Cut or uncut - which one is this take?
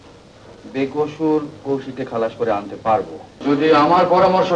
cut